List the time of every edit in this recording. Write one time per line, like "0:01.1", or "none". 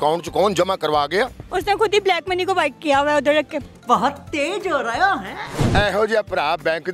0:01.4
0:05.7